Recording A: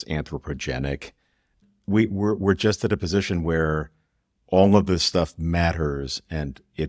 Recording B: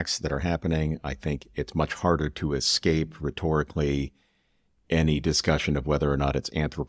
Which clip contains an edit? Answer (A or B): A